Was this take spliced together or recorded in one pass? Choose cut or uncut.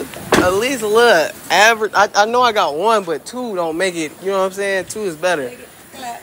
uncut